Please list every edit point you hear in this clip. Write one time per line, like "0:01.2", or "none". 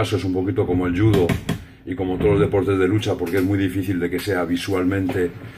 0:01.9